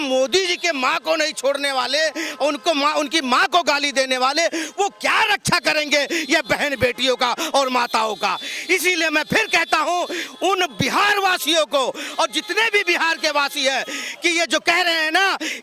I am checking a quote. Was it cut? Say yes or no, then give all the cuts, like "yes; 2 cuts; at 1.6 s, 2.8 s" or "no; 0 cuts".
no; 0 cuts